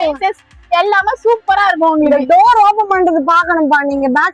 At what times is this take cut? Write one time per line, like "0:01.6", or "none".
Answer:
none